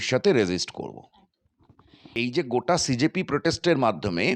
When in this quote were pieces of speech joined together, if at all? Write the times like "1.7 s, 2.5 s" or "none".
2.1 s

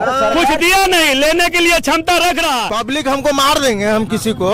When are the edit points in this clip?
2.7 s

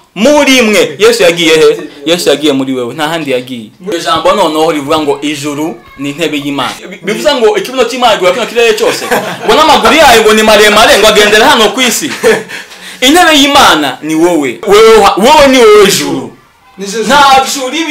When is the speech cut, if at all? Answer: 3.8 s, 6.9 s, 14.7 s

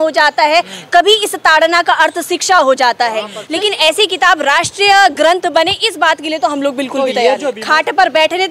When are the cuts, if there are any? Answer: 3.4 s, 7.5 s

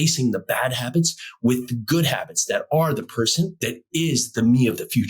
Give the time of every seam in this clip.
3.7 s

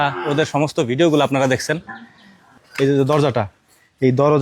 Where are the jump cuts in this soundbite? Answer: 2.6 s

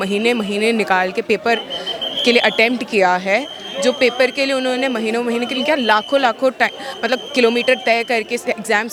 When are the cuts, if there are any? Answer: none

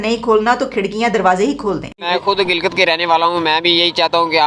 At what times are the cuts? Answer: 2.1 s

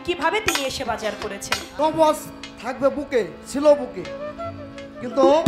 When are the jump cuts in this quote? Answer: 1.6 s

